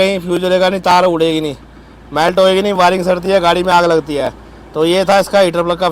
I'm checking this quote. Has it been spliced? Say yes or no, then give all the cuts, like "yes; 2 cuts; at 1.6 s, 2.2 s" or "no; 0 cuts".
no; 0 cuts